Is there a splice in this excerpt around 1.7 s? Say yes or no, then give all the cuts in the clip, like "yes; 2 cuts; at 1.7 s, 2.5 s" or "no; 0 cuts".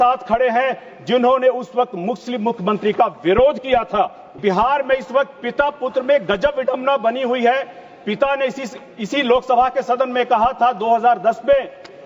no; 1 cut; at 4.3 s